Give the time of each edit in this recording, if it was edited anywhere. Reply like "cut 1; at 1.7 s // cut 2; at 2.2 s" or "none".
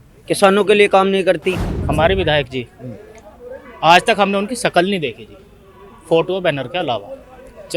cut 1; at 1.7 s